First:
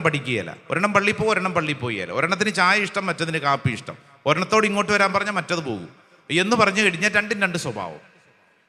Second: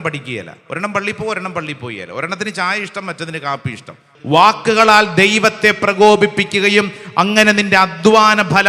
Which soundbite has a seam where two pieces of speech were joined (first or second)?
second